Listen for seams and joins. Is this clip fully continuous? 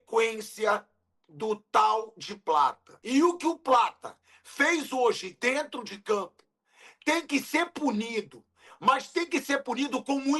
no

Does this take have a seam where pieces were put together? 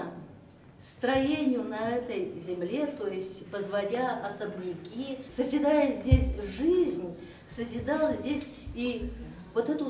yes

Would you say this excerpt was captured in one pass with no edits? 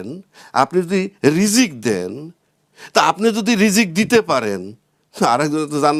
yes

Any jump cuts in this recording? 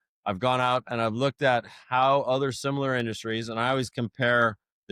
no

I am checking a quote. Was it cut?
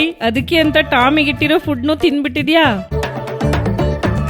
yes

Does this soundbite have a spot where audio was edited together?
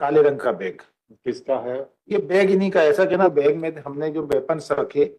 yes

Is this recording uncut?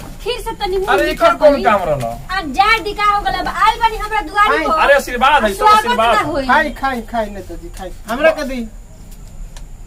yes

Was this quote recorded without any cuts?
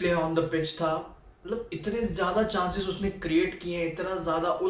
yes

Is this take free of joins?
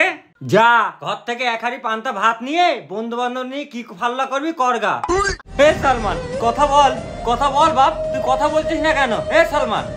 no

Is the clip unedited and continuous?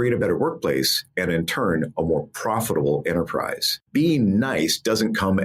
no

